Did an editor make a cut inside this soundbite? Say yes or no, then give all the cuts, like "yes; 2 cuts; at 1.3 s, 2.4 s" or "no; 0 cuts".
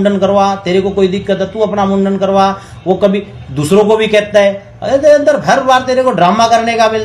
no; 0 cuts